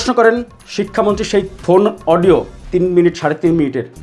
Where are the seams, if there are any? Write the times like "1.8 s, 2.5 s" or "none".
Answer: 1.5 s, 2.6 s